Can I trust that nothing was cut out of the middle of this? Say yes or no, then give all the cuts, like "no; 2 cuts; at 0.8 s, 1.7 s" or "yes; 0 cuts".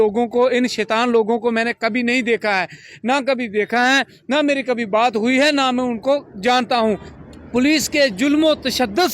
no; 1 cut; at 7.2 s